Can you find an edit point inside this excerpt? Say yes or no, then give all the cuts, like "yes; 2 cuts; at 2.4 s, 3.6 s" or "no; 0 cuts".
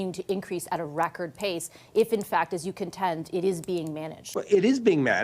yes; 1 cut; at 4.2 s